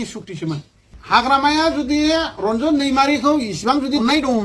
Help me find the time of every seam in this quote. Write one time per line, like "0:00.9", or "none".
0:00.9